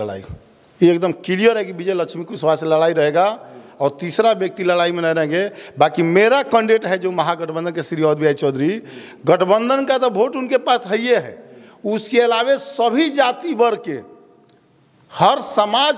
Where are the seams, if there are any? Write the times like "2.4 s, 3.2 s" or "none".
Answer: none